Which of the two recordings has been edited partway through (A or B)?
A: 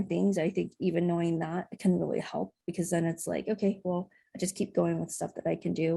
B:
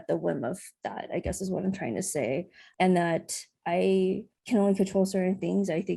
B